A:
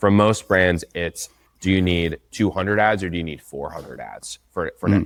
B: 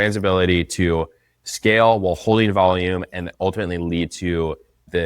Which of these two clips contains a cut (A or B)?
B